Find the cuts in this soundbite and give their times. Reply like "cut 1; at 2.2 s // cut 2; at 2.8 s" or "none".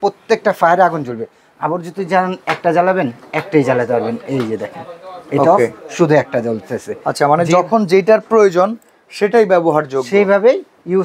none